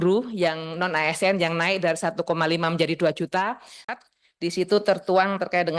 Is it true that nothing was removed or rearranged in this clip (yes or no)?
no